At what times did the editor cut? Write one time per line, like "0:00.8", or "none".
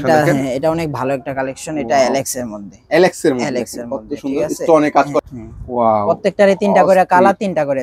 0:05.2